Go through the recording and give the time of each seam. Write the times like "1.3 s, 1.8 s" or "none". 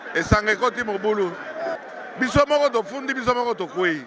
1.8 s